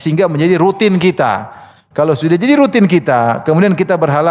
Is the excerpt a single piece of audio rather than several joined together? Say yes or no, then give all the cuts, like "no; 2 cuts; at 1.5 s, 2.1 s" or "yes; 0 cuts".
yes; 0 cuts